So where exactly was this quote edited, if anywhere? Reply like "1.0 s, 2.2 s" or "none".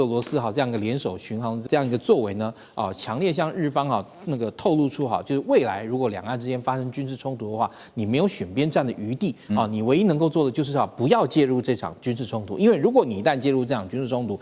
1.6 s